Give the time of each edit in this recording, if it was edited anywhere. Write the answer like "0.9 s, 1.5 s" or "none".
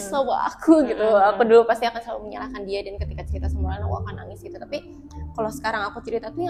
none